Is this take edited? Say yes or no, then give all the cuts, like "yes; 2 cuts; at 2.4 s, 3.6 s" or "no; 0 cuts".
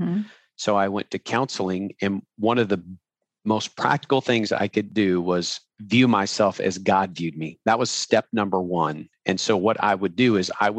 yes; 2 cuts; at 4.9 s, 5.6 s